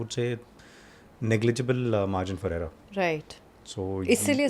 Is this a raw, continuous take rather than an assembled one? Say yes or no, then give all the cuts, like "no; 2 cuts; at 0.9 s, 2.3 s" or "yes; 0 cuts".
yes; 0 cuts